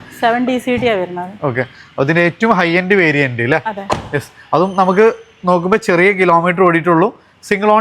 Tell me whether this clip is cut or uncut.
uncut